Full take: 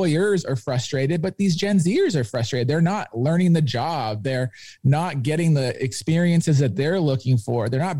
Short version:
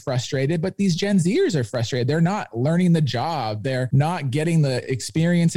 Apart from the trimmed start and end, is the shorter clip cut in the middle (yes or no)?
yes